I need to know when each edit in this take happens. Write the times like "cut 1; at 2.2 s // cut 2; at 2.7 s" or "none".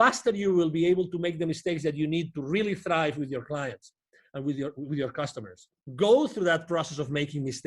cut 1; at 5.8 s